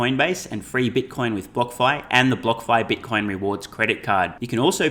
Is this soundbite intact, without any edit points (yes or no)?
yes